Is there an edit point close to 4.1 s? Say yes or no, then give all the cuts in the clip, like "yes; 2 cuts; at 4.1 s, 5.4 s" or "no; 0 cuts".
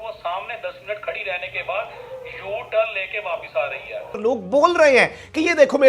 yes; 1 cut; at 4.1 s